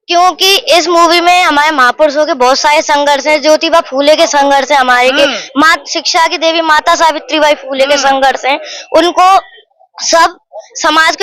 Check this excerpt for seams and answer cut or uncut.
uncut